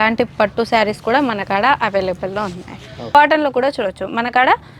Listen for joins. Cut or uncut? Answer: cut